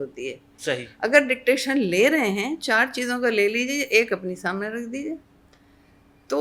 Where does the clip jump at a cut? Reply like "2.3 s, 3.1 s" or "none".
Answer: none

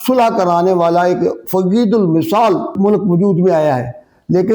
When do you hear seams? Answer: 2.7 s

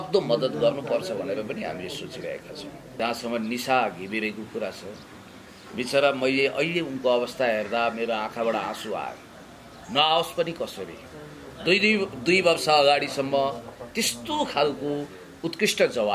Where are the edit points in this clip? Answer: 3.0 s

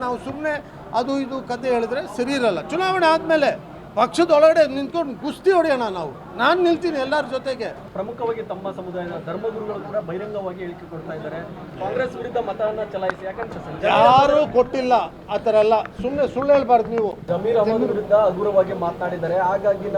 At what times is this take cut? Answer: 7.8 s, 13.4 s, 17.2 s

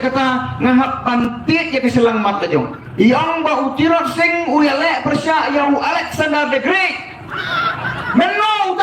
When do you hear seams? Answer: 2.8 s

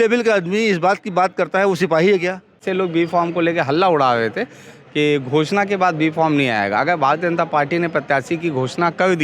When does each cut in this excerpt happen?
2.6 s

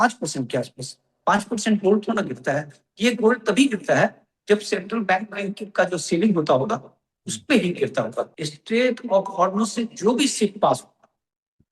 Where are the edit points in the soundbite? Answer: 8.4 s

